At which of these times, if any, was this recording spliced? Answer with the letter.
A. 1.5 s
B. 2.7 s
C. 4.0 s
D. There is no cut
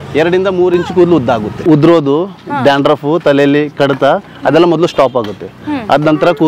A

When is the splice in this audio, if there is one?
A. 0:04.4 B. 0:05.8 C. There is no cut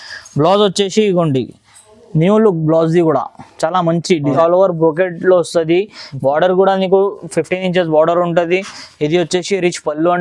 A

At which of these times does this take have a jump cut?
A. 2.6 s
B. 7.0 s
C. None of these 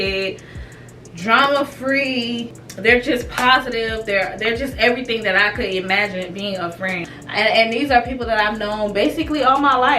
B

